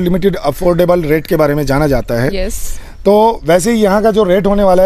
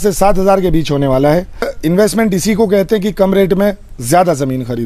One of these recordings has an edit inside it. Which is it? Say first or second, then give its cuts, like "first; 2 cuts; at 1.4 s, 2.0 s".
second; 1 cut; at 1.7 s